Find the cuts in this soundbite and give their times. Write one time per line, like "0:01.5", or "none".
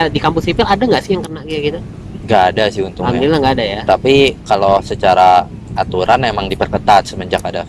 none